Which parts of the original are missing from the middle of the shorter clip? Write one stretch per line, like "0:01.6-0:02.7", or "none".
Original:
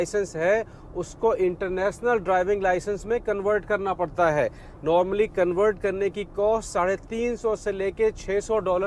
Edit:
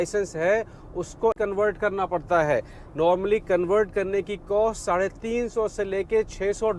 0:01.3-0:03.2